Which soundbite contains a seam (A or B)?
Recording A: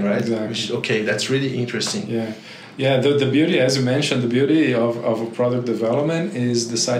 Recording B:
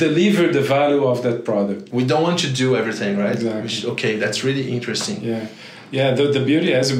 B